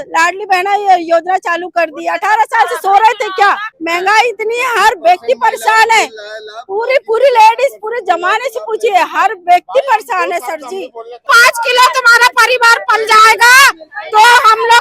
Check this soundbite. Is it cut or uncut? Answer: cut